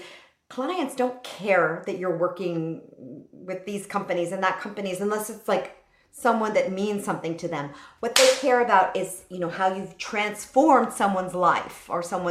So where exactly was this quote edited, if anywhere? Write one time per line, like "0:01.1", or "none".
none